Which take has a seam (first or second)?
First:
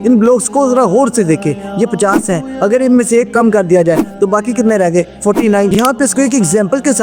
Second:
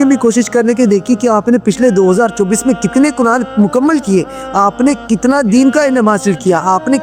first